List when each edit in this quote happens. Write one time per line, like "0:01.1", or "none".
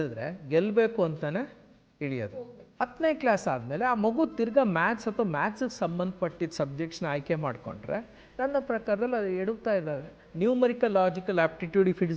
0:02.2
0:10.2